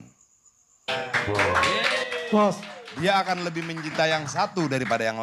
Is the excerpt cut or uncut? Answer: uncut